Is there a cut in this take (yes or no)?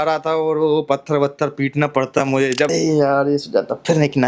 yes